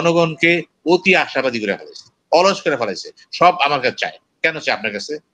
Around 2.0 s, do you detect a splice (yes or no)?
no